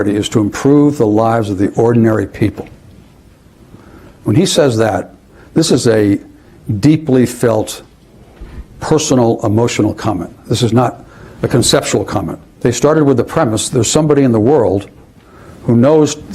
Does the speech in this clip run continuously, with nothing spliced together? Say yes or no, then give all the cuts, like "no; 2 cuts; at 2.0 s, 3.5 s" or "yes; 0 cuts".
no; 1 cut; at 12.4 s